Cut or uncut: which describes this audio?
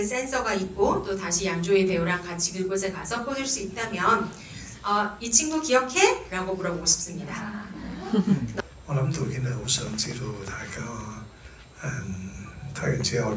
cut